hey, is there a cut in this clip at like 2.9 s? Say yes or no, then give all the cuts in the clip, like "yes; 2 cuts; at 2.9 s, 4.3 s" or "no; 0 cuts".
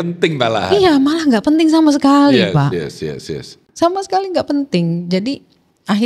no; 0 cuts